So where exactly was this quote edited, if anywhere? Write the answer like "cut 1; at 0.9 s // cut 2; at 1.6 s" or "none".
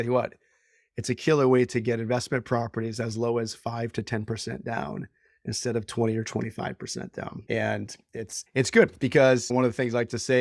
cut 1; at 7.4 s // cut 2; at 8.3 s // cut 3; at 9.5 s